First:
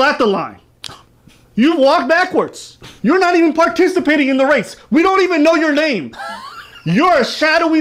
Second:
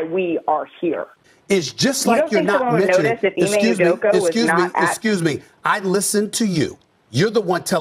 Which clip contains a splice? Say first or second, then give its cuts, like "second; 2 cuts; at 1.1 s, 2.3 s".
second; 1 cut; at 1.2 s